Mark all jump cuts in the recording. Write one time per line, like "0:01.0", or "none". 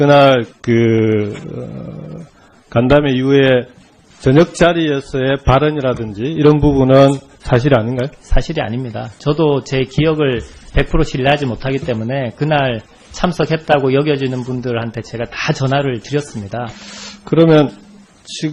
none

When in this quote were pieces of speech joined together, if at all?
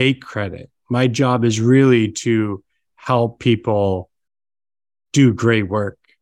none

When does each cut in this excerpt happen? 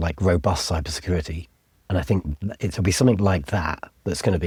none

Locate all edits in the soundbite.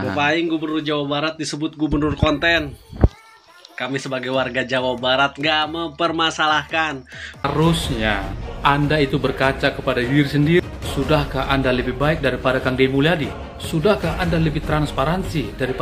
0:07.5

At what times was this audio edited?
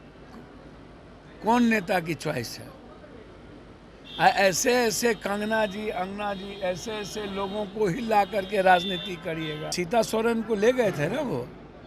0:09.7

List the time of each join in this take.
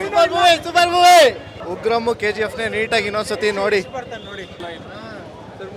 none

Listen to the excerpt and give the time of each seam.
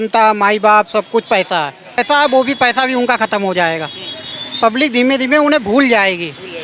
0:02.0

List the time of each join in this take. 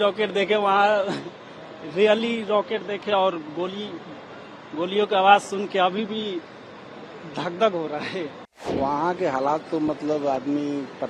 0:08.7

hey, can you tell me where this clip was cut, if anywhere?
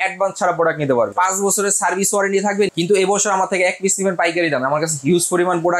0:01.1
0:02.7

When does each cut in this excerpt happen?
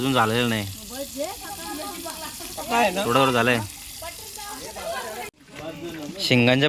none

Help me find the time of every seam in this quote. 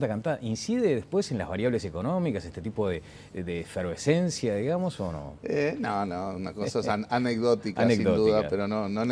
0:07.8

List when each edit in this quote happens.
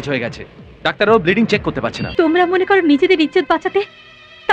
0:02.0

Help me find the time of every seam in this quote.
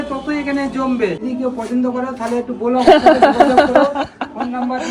0:01.2

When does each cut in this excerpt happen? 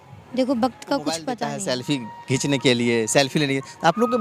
0:01.3

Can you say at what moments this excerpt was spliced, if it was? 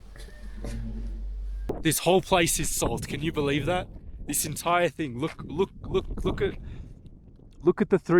0:01.5

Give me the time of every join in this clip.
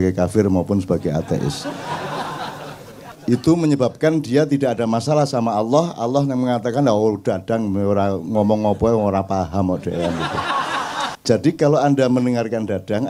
0:03.1
0:11.2

